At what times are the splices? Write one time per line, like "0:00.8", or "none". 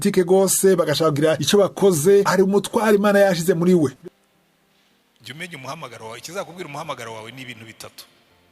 0:04.0